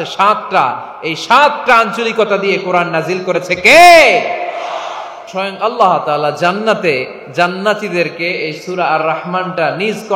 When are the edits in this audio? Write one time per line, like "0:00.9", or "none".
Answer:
0:05.2